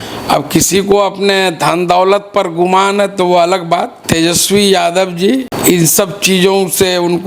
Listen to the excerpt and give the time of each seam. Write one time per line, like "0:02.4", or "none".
0:04.0
0:05.5

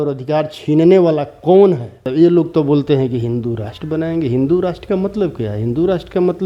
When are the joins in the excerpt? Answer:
0:02.0

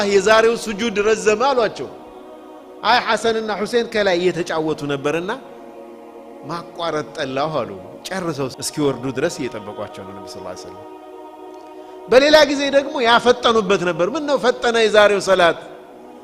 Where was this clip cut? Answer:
0:08.6

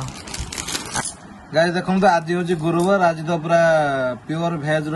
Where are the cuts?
0:01.0

